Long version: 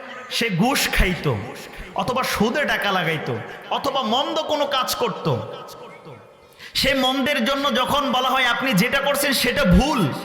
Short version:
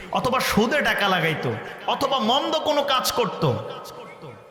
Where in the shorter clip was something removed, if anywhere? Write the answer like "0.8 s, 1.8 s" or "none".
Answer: none

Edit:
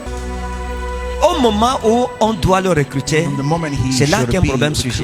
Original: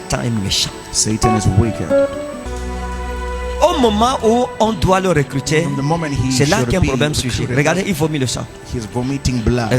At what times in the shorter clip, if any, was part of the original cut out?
none

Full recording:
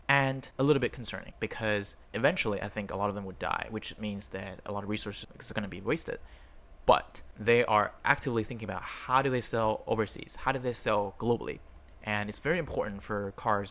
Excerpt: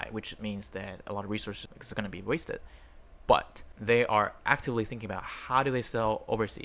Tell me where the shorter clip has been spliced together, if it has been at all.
none

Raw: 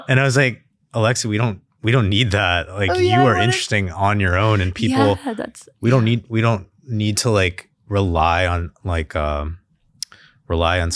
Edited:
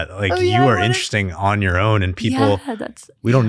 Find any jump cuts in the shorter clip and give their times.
none

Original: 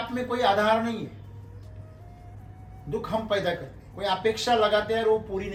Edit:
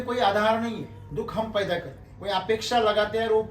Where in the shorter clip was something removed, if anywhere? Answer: 1.0 s

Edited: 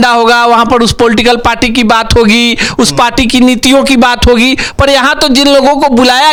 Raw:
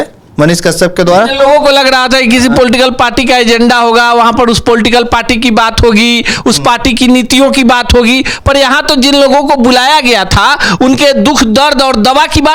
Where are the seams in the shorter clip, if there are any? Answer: none

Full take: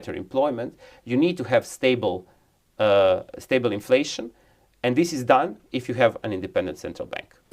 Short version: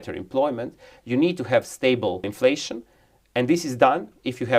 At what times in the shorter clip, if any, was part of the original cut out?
2.3 s

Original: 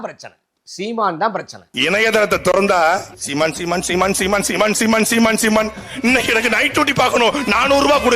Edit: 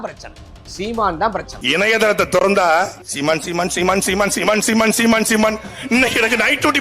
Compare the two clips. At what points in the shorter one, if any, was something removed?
1.5 s

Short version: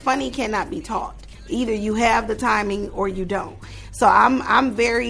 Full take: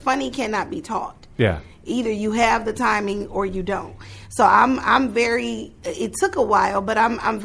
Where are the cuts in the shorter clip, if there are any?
1.3 s

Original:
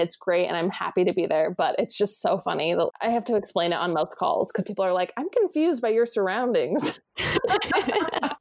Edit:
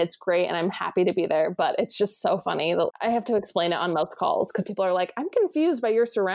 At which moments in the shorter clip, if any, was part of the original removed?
none

